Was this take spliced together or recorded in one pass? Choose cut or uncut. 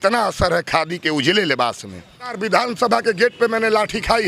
cut